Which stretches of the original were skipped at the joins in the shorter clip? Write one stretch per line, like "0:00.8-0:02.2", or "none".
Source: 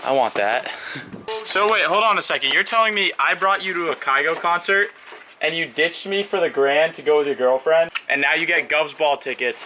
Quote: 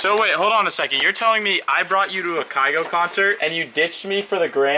0:04.9-0:05.4

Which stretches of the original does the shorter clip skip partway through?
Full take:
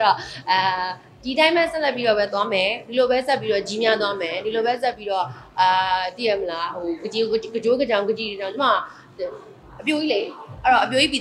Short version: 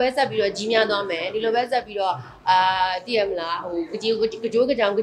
none

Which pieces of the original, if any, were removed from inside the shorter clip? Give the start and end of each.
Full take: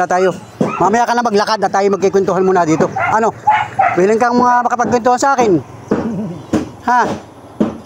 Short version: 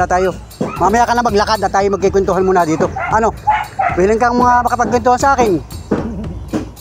none

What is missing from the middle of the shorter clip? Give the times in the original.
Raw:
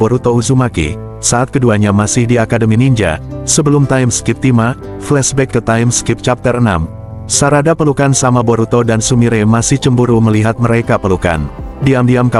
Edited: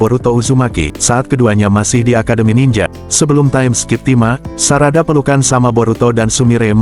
0:00.9-0:01.1
0:03.2-0:03.4
0:04.9-0:07.2

